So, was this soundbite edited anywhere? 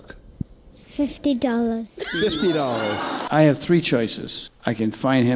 yes; 1 cut; at 3.2 s

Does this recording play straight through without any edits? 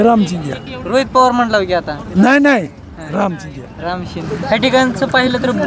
no; 1 cut; at 4.3 s

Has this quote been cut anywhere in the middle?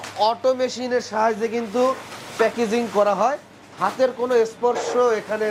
no; 0 cuts

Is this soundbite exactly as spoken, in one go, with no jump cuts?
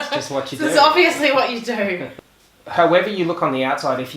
no; 1 cut; at 2.1 s

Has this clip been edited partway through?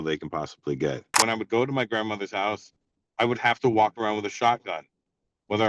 yes; 1 cut; at 1.2 s

